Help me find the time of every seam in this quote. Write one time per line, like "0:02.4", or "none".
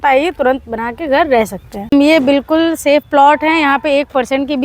0:01.9